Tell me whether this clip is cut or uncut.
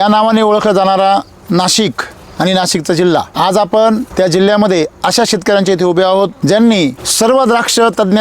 cut